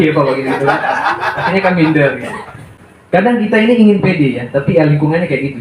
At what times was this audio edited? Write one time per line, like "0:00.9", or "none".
0:02.6